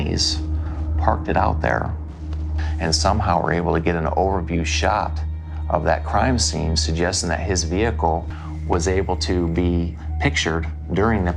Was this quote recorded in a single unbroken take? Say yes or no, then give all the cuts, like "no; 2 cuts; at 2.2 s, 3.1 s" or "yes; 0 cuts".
yes; 0 cuts